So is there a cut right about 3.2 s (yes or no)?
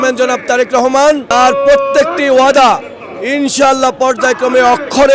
no